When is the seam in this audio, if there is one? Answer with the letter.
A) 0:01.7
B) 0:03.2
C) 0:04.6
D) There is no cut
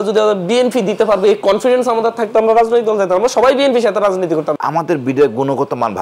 C